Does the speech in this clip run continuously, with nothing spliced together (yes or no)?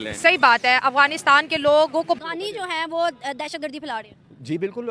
no